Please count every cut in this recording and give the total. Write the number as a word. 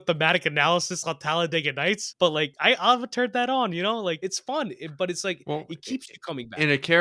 two